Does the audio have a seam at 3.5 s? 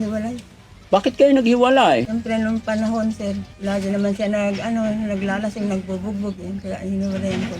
yes; 2 cuts; at 2.1 s, 3.5 s

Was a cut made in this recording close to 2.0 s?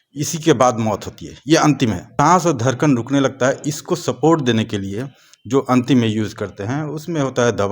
yes; 1 cut; at 2.0 s

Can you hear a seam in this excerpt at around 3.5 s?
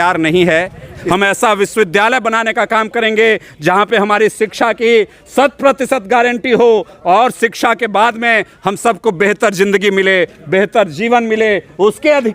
no; 1 cut; at 1.0 s

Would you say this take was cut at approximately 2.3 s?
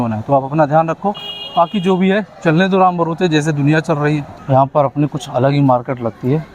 no; 1 cut; at 4.3 s

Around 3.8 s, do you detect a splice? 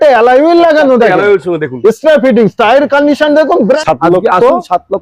yes; 1 cut; at 3.8 s

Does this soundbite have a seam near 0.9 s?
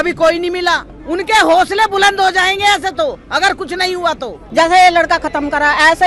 yes; 2 cuts; at 0.9 s, 4.4 s

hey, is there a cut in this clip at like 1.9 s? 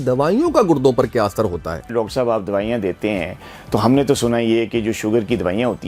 yes; 1 cut; at 1.9 s

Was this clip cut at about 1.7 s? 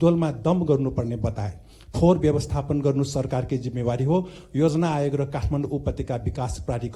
no; 0 cuts

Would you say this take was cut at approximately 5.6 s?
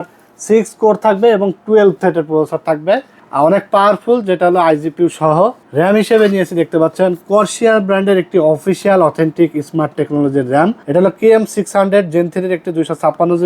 yes; 3 cuts; at 3.2 s, 5.6 s, 10.8 s

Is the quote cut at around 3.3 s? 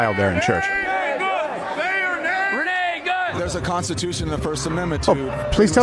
yes; 1 cut; at 3.3 s

